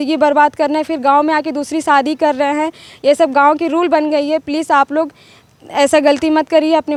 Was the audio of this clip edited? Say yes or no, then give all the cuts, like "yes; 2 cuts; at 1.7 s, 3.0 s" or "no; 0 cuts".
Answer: no; 0 cuts